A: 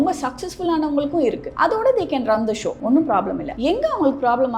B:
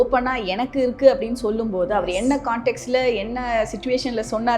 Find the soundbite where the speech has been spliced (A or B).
A